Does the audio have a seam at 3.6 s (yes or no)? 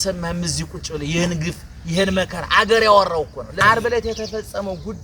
yes